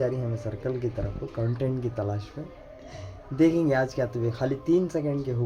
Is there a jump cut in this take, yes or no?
no